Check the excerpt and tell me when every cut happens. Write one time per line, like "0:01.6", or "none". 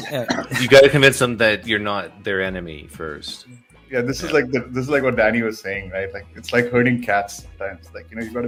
none

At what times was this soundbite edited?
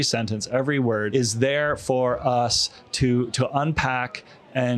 0:01.1

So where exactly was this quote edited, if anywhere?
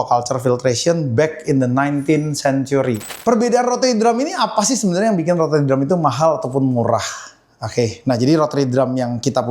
0:03.1

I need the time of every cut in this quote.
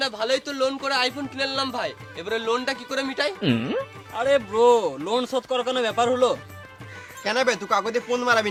none

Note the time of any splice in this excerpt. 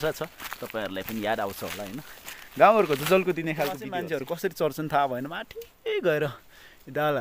0:03.8

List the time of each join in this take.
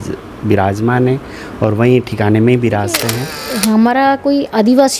0:03.5

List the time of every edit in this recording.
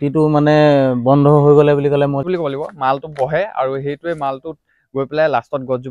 0:02.2

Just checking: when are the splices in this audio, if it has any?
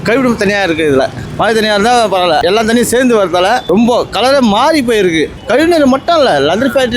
0:01.2
0:02.4
0:03.6
0:05.4

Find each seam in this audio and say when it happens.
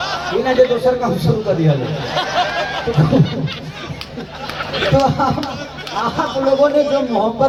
none

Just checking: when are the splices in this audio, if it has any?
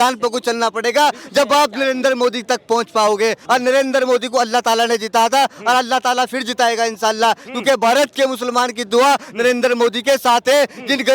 0:03.4

